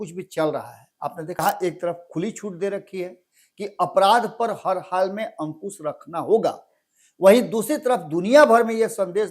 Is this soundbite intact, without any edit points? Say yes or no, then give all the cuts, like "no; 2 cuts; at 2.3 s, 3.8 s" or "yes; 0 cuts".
no; 1 cut; at 1.4 s